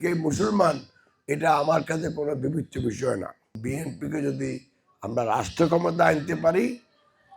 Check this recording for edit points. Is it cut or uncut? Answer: cut